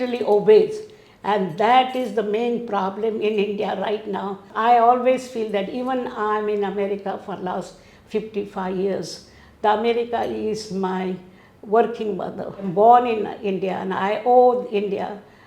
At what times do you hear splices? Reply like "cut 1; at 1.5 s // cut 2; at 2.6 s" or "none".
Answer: cut 1; at 4.5 s // cut 2; at 12.7 s